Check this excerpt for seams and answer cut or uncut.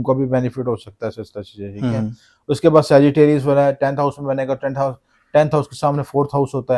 uncut